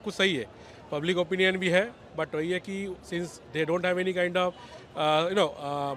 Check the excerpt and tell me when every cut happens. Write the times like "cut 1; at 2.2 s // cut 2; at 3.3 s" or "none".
none

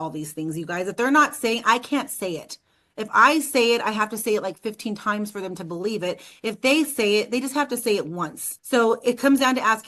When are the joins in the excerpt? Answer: cut 1; at 8.5 s

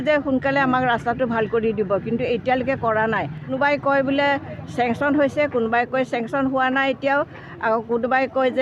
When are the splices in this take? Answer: cut 1; at 3.5 s

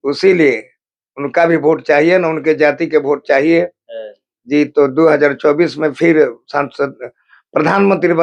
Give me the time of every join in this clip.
none

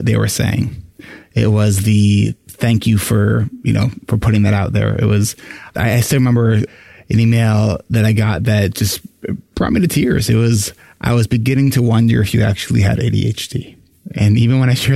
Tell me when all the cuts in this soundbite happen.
cut 1; at 5.7 s // cut 2; at 6.7 s

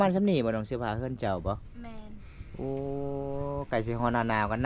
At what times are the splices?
none

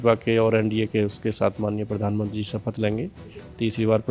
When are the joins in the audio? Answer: none

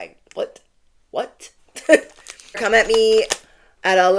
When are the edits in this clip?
cut 1; at 2.6 s

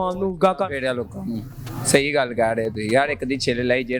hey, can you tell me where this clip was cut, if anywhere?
none

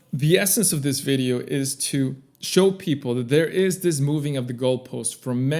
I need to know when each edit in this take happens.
none

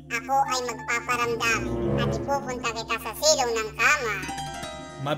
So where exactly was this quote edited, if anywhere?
cut 1; at 2.1 s

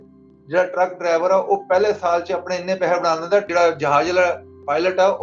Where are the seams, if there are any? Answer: cut 1; at 3.5 s

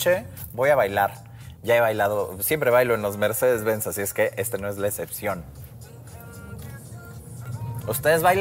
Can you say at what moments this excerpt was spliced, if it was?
cut 1; at 7.5 s

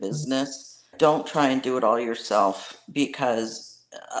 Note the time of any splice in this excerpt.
cut 1; at 0.9 s

